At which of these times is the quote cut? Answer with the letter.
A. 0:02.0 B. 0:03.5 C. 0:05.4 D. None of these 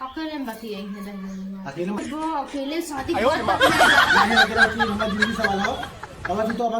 A